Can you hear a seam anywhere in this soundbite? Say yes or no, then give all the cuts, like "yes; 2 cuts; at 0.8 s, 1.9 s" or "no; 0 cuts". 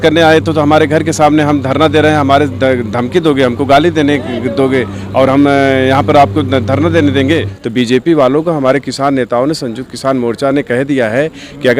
yes; 1 cut; at 7.6 s